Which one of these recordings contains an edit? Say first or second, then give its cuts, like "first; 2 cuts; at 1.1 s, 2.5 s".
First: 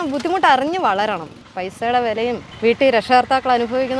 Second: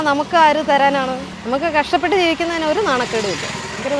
first; 1 cut; at 2.5 s